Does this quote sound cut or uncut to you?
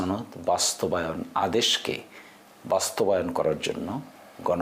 uncut